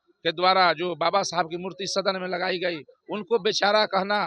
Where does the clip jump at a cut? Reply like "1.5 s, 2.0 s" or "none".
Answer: none